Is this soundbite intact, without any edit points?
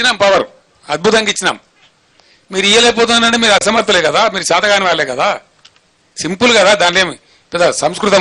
yes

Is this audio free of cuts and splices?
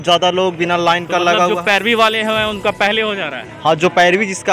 yes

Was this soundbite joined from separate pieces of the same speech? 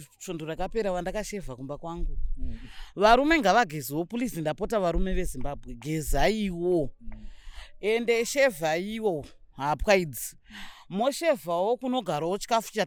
no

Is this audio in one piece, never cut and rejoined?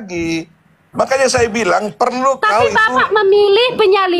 yes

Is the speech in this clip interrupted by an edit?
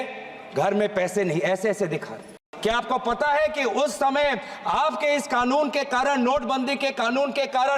yes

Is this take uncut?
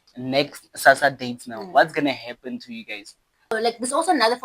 no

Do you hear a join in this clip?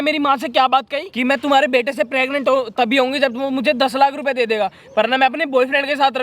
yes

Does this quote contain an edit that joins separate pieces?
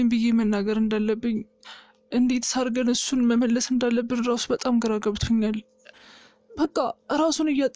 yes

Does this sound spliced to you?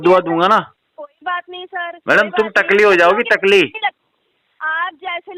no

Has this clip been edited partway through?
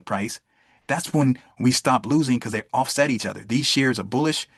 no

